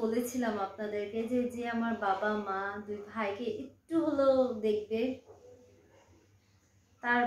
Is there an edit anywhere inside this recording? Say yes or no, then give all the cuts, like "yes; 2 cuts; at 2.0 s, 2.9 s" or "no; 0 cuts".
no; 0 cuts